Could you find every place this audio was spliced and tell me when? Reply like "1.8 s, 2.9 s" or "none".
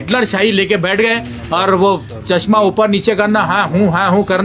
none